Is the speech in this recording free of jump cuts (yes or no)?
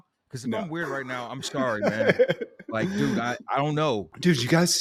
yes